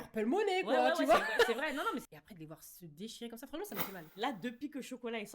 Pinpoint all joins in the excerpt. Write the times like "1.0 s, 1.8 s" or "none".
4.1 s